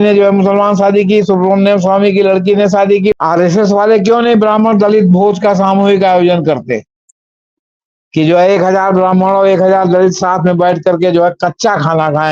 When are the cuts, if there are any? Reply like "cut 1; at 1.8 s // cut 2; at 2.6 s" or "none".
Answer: cut 1; at 3.1 s